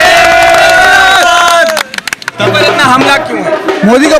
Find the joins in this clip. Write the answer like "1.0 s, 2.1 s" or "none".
2.4 s